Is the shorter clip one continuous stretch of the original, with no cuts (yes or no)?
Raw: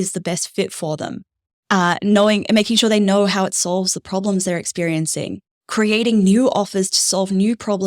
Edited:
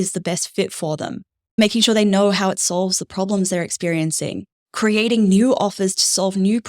no